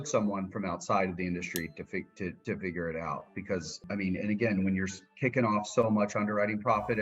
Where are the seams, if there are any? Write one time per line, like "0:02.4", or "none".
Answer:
0:02.4
0:03.9